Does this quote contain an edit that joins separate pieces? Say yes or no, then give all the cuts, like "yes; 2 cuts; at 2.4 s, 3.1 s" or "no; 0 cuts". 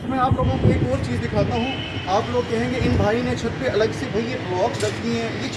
no; 0 cuts